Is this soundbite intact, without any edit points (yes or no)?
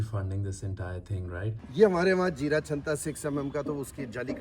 no